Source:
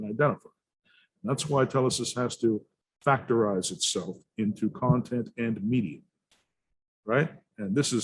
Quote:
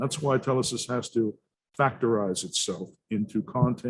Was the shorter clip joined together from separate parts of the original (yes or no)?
no